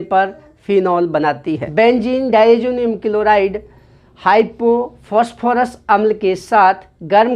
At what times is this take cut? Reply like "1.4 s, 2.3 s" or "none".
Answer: 1.6 s